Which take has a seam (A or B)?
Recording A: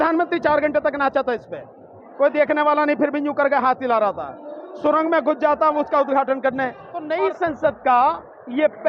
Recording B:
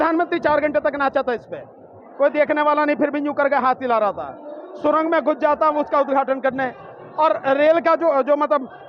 A